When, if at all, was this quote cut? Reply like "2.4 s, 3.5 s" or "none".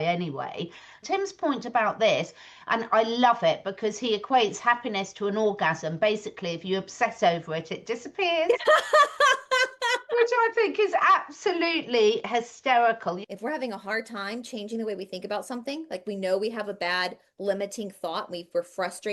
1.0 s, 13.3 s

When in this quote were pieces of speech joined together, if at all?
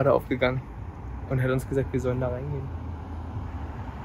none

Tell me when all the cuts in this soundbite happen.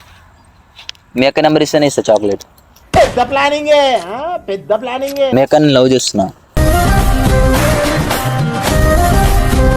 5.3 s

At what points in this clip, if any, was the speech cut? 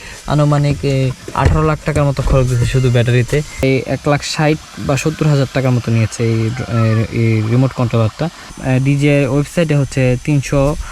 3.6 s, 8.6 s

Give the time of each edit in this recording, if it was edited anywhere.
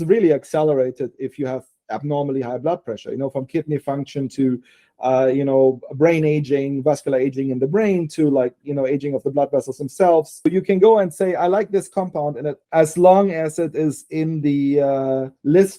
10.5 s, 12.5 s

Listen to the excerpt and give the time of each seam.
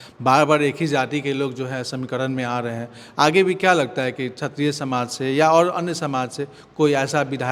none

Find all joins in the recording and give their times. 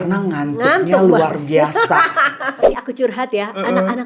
2.5 s

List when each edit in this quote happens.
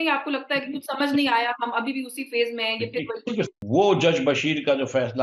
3.6 s

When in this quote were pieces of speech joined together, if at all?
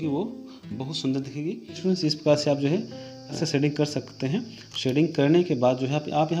1.8 s, 3.4 s

